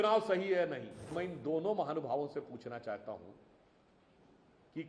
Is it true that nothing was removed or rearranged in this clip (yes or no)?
no